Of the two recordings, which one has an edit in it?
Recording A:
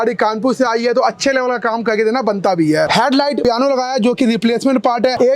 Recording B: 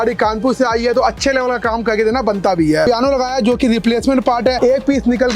B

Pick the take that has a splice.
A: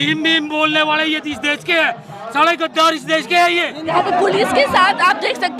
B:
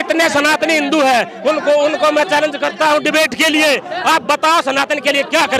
A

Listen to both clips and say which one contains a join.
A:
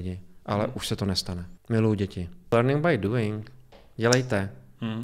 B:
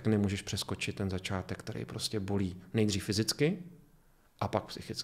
A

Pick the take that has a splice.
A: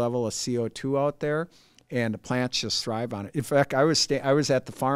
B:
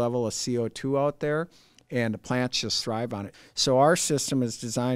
B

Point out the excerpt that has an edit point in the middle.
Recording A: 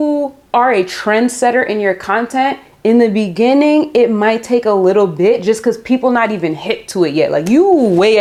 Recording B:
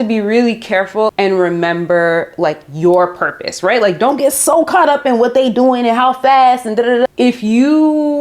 B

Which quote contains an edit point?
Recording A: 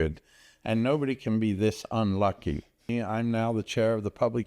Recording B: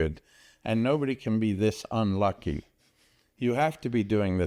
A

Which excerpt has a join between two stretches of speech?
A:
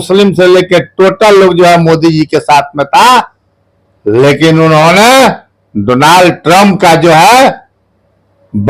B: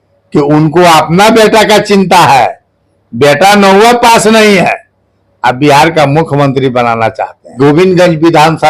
B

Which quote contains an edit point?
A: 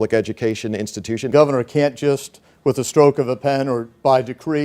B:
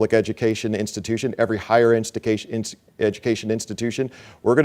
A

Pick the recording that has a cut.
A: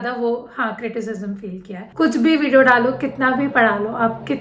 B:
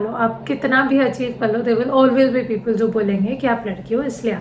A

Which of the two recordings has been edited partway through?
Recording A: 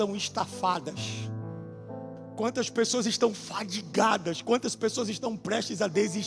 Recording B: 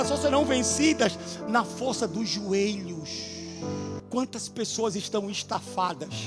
B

